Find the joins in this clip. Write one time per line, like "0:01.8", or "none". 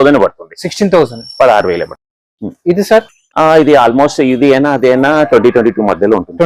none